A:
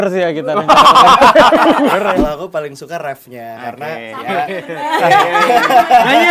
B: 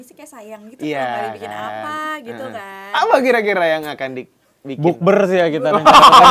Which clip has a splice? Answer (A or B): A